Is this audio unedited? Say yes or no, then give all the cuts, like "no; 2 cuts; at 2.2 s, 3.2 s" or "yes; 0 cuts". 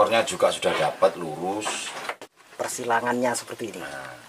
no; 1 cut; at 2.3 s